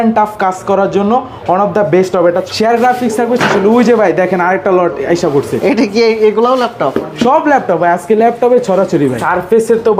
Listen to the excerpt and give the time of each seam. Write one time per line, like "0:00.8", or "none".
0:02.5
0:09.2